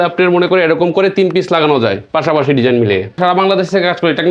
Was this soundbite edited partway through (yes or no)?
yes